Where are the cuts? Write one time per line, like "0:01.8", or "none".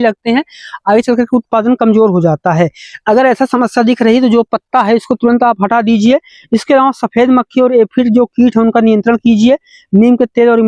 none